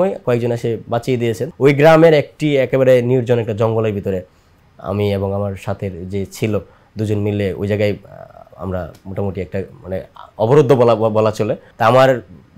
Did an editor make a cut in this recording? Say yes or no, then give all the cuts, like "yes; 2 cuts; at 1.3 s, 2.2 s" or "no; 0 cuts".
yes; 2 cuts; at 1.5 s, 11.6 s